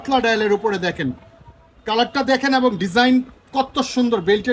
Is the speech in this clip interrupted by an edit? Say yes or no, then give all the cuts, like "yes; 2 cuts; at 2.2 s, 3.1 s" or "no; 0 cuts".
no; 0 cuts